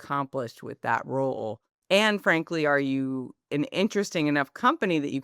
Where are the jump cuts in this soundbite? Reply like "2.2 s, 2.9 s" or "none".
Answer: 1.7 s, 3.3 s